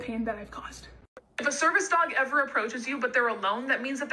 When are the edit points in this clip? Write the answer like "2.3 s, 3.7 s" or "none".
1.1 s